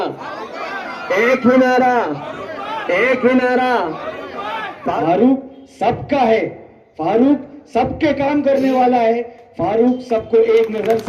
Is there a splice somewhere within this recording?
yes; 1 cut; at 4.9 s

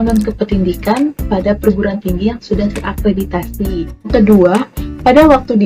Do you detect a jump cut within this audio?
yes; 1 cut; at 4.1 s

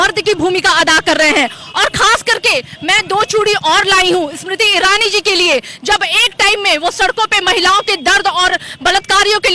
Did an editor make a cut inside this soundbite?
no; 0 cuts

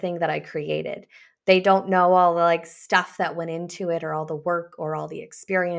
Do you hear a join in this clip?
no; 0 cuts

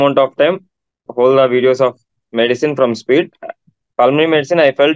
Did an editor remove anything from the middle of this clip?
yes; 2 cuts; at 1.1 s, 3.3 s

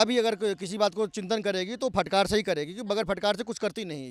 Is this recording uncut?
yes; 0 cuts

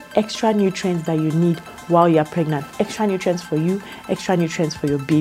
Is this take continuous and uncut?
yes; 0 cuts

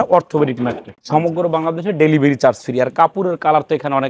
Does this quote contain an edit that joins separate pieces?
yes; 1 cut; at 0.9 s

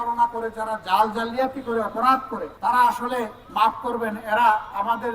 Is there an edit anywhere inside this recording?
yes; 2 cuts; at 2.4 s, 3.4 s

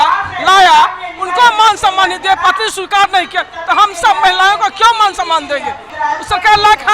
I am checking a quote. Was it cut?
yes; 1 cut; at 5.9 s

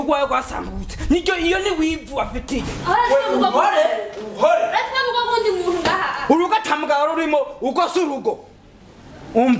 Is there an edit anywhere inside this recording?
yes; 1 cut; at 6.1 s

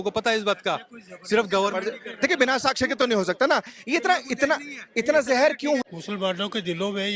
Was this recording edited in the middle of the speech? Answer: yes; 1 cut; at 5.8 s

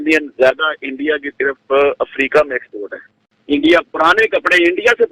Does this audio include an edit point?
yes; 1 cut; at 3.2 s

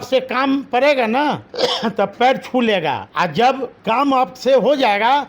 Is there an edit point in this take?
yes; 3 cuts; at 1.5 s, 3.1 s, 3.8 s

